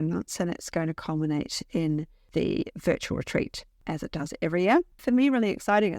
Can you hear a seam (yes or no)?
yes